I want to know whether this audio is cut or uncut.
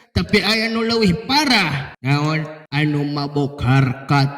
cut